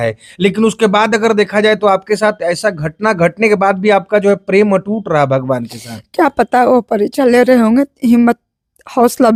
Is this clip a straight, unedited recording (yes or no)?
yes